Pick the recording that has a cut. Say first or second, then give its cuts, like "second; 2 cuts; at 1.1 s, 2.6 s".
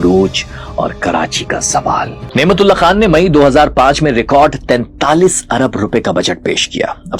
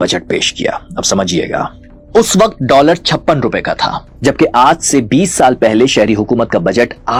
first; 1 cut; at 2.2 s